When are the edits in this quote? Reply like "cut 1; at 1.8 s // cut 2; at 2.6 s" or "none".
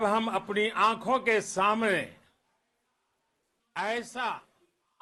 none